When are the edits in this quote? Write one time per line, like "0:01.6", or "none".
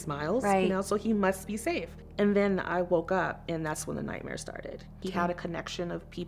0:02.0
0:05.0